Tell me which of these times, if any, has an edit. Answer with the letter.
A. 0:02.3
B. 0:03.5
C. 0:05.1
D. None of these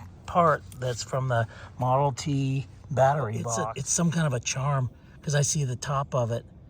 B